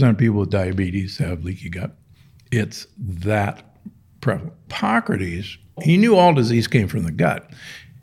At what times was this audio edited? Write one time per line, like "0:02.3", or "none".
0:04.7
0:05.8